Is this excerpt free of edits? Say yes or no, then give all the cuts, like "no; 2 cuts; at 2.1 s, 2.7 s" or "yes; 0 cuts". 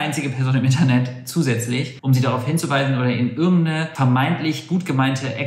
yes; 0 cuts